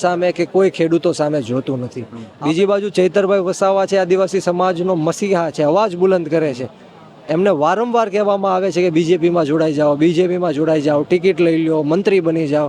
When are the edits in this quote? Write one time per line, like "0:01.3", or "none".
0:02.1